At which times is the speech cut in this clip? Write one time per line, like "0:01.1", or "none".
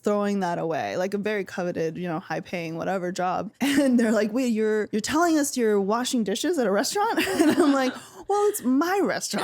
0:03.5
0:04.9